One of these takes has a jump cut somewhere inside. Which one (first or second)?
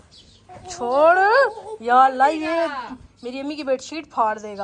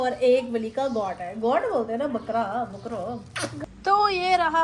second